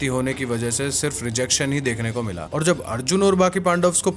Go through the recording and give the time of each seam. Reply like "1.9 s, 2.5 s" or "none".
2.4 s